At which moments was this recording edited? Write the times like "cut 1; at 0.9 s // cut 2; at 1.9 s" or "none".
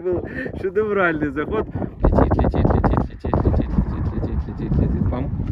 cut 1; at 2.0 s

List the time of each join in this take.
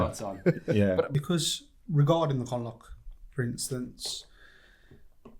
cut 1; at 1.1 s

